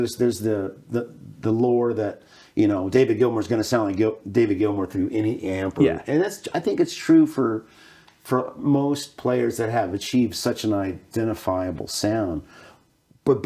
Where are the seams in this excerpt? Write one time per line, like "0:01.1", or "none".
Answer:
none